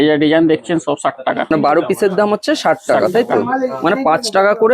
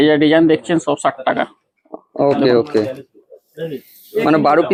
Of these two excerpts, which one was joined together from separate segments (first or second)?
first